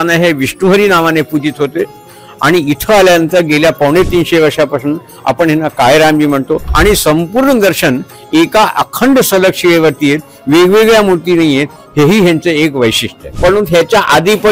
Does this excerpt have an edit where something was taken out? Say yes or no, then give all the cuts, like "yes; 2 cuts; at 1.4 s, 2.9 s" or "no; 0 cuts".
yes; 2 cuts; at 6.7 s, 13.3 s